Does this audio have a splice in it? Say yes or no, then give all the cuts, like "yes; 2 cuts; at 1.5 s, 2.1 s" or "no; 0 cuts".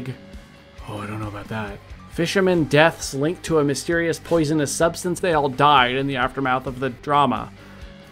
yes; 3 cuts; at 1.9 s, 5.2 s, 7.0 s